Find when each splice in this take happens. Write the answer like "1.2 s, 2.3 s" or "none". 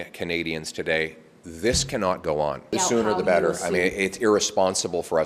2.7 s